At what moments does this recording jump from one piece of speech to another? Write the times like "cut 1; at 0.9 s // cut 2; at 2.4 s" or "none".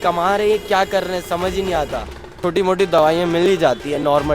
cut 1; at 2.4 s

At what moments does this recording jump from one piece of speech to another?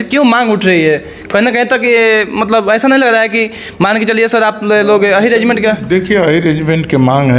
none

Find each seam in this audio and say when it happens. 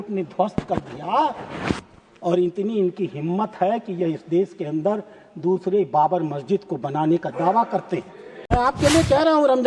cut 1; at 8.5 s

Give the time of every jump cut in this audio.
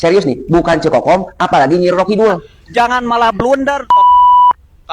cut 1; at 2.5 s

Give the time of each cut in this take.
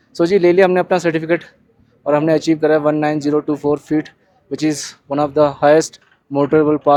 none

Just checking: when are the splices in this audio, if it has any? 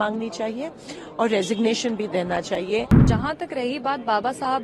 cut 1; at 3.0 s

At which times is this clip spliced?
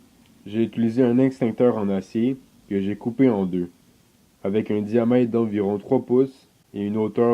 cut 1; at 1.7 s

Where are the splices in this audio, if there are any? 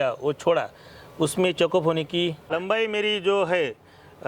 cut 1; at 2.5 s

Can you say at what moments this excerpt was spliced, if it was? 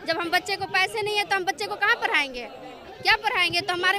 none

